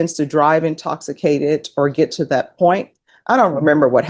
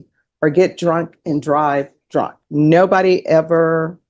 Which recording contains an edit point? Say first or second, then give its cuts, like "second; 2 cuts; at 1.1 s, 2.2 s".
first; 1 cut; at 2.9 s